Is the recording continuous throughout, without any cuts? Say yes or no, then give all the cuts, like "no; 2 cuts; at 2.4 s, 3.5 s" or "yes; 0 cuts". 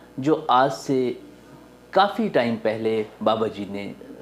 yes; 0 cuts